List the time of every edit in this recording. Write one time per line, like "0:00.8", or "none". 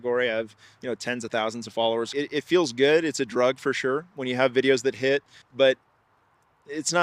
0:02.1
0:05.4